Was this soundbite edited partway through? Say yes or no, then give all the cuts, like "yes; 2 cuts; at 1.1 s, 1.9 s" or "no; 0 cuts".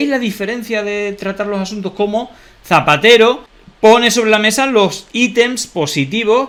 no; 0 cuts